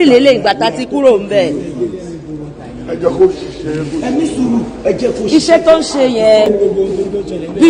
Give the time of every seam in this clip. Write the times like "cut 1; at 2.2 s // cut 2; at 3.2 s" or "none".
cut 1; at 6.5 s